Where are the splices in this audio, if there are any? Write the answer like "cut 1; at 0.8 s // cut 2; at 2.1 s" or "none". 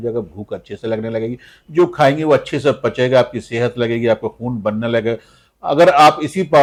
none